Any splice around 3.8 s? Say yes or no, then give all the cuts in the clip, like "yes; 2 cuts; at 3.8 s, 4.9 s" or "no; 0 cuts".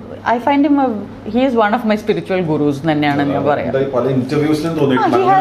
no; 0 cuts